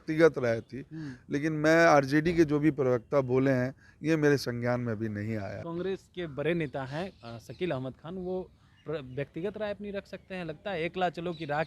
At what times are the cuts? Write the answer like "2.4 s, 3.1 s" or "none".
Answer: 5.6 s